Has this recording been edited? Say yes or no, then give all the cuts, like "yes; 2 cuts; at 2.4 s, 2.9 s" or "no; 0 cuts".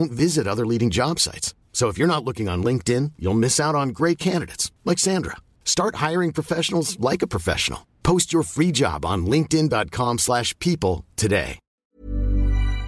yes; 1 cut; at 11.6 s